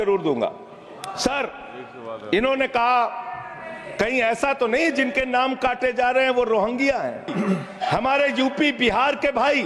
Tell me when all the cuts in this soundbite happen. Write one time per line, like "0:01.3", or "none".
0:07.3